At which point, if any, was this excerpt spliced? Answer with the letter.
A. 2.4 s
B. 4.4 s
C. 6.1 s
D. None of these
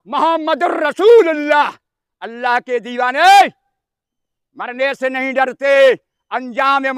D